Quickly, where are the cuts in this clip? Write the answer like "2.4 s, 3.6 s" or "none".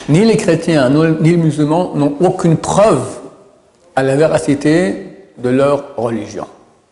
none